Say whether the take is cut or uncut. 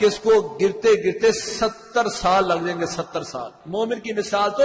cut